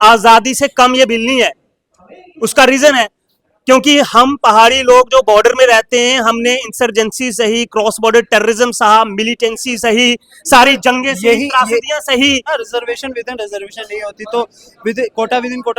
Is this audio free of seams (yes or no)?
no